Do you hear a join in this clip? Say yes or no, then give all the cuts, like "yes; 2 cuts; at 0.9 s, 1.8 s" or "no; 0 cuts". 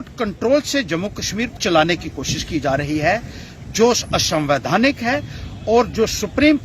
yes; 1 cut; at 1.6 s